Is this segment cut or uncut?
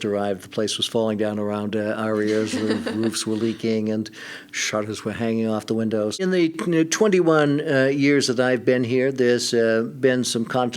cut